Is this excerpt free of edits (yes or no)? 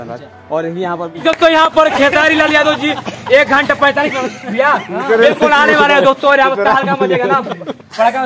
no